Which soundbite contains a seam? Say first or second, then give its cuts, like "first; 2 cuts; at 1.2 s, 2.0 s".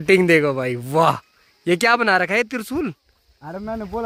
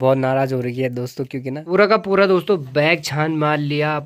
second; 1 cut; at 1.6 s